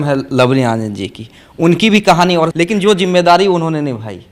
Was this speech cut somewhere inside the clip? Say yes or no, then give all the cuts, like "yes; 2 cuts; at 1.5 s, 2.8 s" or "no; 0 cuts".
yes; 1 cut; at 2.5 s